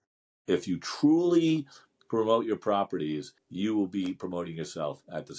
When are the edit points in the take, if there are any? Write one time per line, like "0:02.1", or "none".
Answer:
0:03.4